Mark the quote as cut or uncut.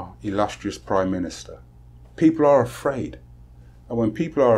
uncut